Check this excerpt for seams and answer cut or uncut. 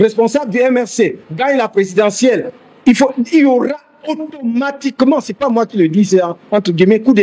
uncut